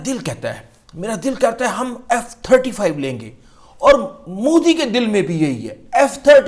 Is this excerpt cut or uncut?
uncut